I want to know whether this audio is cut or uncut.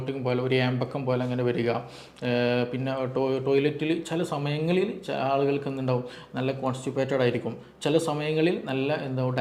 uncut